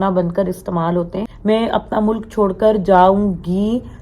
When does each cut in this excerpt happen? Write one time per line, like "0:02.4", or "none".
0:01.2